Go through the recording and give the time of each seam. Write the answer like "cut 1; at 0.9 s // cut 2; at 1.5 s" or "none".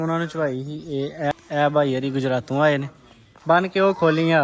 cut 1; at 1.3 s